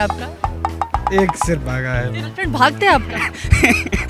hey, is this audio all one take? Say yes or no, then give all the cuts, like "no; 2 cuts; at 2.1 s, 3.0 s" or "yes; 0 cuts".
no; 1 cut; at 2.0 s